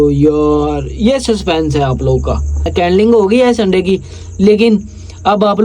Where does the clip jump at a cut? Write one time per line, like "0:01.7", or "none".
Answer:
0:02.5